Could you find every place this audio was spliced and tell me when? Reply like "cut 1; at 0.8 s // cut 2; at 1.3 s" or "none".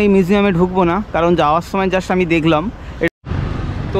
cut 1; at 3.1 s

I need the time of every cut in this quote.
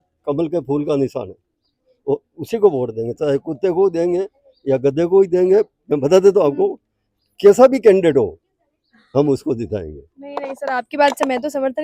none

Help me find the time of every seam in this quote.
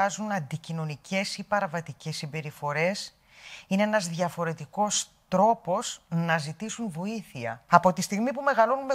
cut 1; at 7.6 s

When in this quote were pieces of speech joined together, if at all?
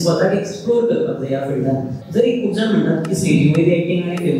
cut 1; at 2.0 s

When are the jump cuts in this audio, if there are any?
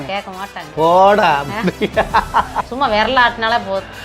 cut 1; at 2.6 s

